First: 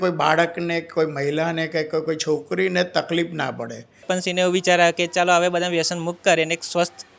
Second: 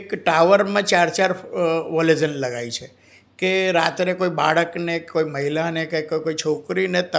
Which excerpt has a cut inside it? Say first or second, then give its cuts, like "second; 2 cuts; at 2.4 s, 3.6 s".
first; 1 cut; at 4.2 s